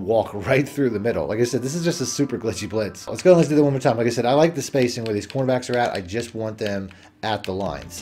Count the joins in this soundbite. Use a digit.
0